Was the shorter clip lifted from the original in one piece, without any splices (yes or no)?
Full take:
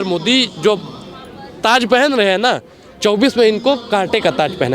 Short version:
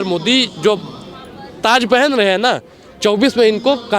yes